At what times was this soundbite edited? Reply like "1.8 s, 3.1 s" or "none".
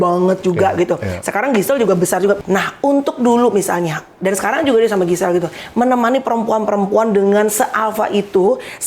2.4 s